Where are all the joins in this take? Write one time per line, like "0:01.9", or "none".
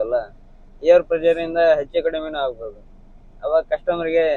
none